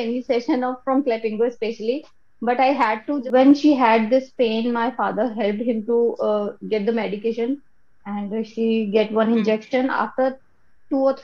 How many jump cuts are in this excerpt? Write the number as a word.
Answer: one